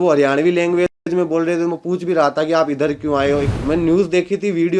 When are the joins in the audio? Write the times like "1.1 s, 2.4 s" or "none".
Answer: 3.5 s